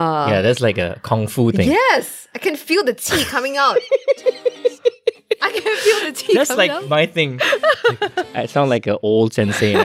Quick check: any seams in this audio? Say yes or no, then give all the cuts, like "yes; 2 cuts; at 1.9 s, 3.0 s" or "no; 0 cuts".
yes; 1 cut; at 8.3 s